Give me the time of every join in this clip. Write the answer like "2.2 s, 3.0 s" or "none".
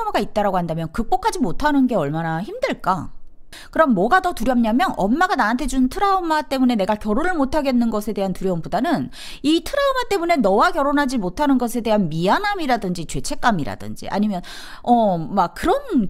3.5 s